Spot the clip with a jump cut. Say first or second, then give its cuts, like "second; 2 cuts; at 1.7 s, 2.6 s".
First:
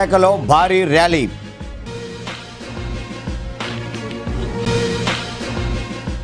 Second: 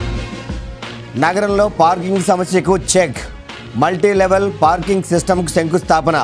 second; 1 cut; at 1.0 s